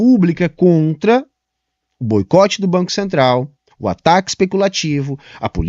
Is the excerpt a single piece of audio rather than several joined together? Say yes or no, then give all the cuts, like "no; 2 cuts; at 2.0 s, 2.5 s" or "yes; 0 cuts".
yes; 0 cuts